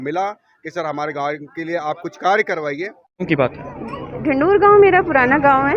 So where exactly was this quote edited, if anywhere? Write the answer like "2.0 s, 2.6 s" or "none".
3.2 s